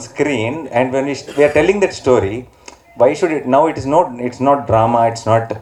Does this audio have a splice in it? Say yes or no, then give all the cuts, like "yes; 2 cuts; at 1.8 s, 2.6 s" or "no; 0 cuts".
no; 0 cuts